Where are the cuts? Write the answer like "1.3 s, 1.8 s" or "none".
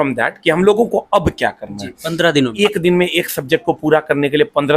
2.5 s